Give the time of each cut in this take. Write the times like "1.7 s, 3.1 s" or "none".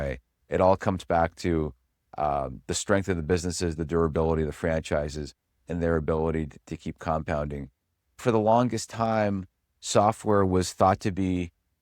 8.2 s

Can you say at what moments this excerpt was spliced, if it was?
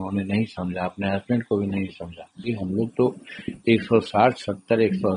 2.5 s

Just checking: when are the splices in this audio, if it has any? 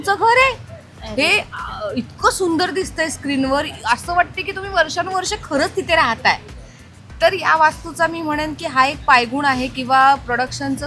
none

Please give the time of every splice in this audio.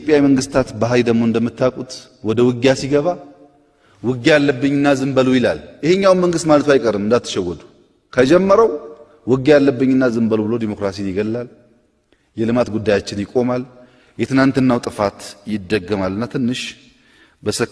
none

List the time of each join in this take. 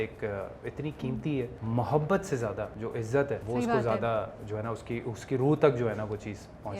1.6 s, 3.2 s

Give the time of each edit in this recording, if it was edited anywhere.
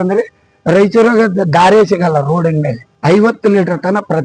2.9 s

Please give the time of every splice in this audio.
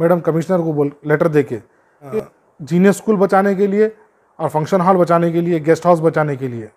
2.1 s

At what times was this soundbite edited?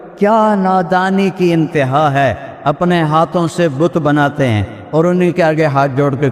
4.7 s

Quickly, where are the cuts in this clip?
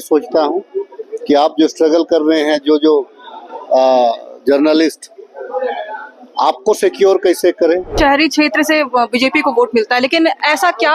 8.0 s

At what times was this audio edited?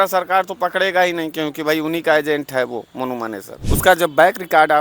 3.6 s

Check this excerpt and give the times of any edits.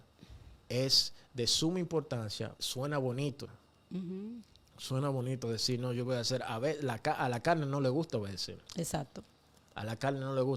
none

